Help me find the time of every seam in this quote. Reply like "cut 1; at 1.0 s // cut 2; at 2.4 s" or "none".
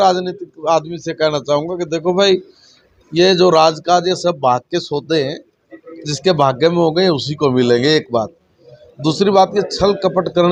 none